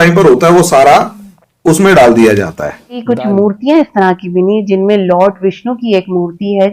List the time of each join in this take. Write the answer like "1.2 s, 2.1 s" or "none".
3.0 s